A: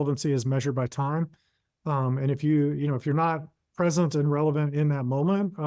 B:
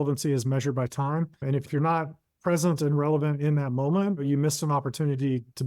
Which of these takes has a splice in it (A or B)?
B